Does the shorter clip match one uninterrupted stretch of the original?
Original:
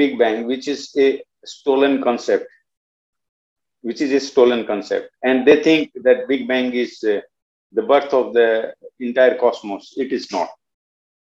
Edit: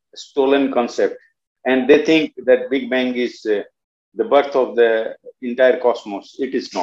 no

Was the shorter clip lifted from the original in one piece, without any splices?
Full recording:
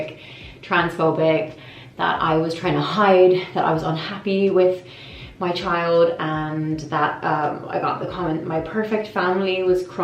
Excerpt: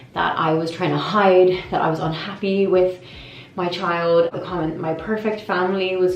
no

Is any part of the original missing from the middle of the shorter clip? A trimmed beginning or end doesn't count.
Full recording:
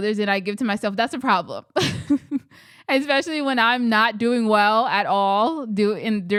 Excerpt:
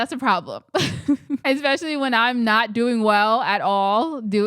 yes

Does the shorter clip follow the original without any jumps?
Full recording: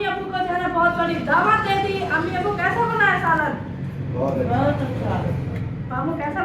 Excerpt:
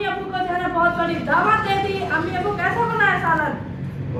yes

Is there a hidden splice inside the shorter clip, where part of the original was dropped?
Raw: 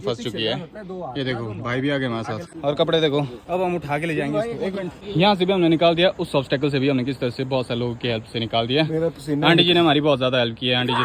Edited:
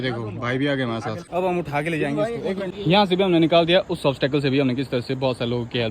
yes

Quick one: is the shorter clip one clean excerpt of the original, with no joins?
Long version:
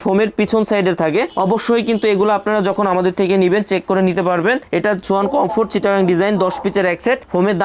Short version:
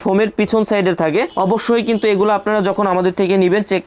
yes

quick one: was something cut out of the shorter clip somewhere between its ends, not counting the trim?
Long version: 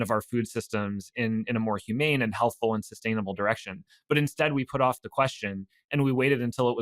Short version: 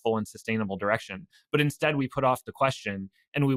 no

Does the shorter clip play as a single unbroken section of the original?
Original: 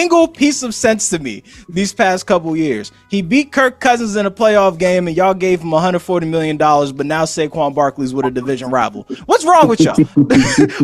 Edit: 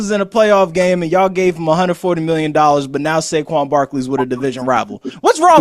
yes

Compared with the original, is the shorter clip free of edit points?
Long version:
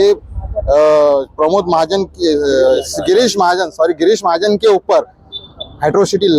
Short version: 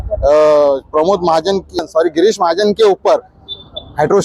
no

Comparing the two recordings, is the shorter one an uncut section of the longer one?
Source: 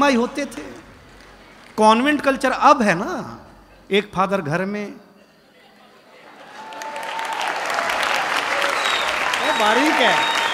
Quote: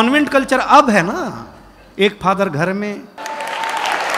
no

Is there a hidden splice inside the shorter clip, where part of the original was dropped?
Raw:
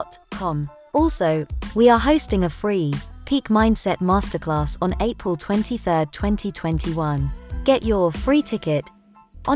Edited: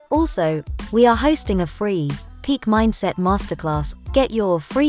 yes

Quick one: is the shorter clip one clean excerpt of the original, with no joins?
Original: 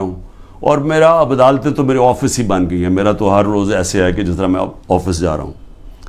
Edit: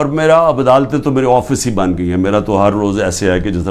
yes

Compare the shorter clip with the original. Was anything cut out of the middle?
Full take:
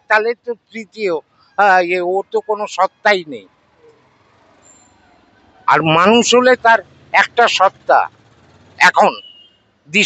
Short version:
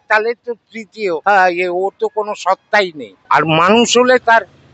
yes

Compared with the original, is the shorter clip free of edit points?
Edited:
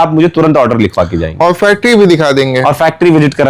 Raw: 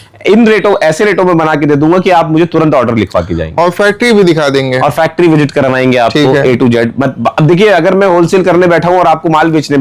yes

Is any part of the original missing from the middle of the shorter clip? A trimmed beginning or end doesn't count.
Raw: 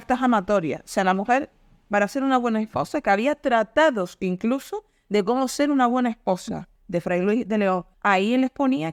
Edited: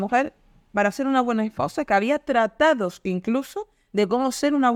no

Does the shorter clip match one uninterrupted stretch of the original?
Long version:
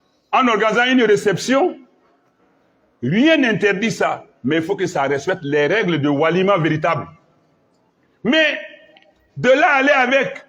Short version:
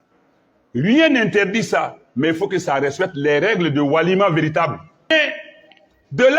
no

